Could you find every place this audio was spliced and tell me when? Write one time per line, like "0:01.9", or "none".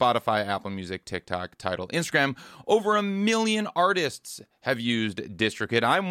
none